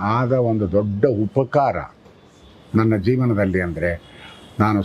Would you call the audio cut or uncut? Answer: uncut